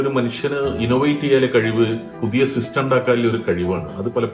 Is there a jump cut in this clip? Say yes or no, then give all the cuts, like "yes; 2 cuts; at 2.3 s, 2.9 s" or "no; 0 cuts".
yes; 1 cut; at 2.1 s